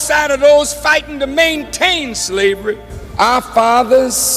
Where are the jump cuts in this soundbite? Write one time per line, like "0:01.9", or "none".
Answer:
0:03.2